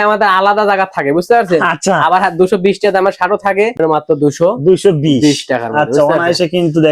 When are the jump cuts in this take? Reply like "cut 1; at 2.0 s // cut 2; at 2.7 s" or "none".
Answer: cut 1; at 3.8 s